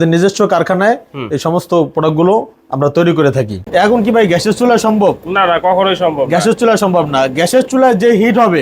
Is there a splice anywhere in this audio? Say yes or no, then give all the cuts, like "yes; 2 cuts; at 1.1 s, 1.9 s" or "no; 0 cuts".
yes; 1 cut; at 3.6 s